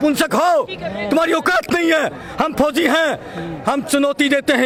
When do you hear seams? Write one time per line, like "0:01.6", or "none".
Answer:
none